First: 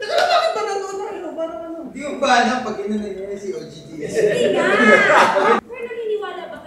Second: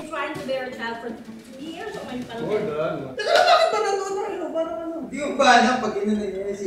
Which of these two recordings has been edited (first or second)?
first